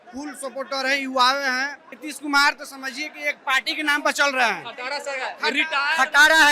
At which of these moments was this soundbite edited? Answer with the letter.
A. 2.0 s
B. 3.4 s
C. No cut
A